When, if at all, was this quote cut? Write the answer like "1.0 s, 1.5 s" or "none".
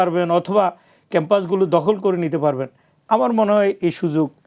none